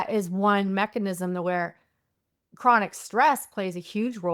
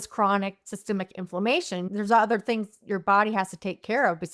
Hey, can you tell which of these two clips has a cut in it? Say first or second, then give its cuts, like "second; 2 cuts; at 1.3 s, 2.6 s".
second; 1 cut; at 1.9 s